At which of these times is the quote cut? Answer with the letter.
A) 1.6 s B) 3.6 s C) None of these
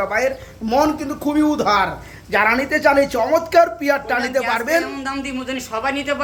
C